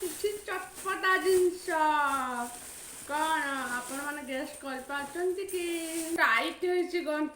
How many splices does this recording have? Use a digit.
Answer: 1